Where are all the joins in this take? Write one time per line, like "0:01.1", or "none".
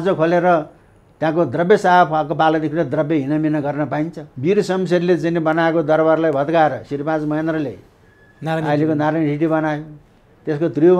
0:04.2